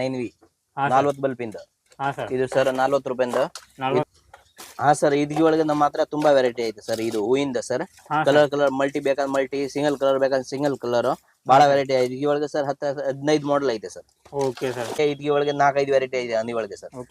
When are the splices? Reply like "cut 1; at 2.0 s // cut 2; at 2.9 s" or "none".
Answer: cut 1; at 4.0 s // cut 2; at 15.0 s